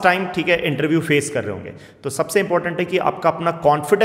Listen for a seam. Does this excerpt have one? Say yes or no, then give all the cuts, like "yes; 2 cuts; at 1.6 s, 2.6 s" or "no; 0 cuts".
no; 0 cuts